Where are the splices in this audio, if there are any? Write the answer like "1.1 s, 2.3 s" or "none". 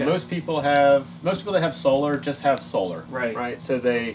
3.0 s